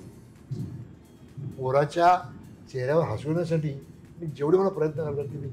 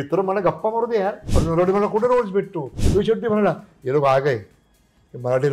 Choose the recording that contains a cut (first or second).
second